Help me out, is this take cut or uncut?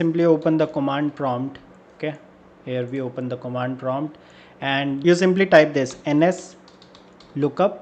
uncut